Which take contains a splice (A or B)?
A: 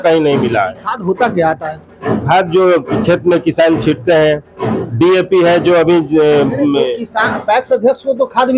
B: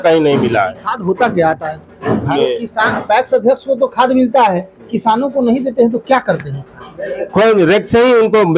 B